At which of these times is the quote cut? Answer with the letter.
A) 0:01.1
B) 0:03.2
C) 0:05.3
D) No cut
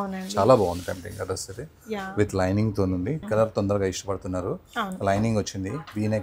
B